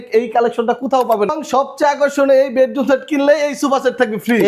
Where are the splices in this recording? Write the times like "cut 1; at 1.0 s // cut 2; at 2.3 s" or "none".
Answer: cut 1; at 1.3 s